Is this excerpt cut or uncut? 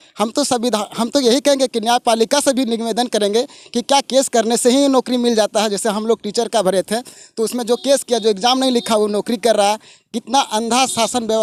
uncut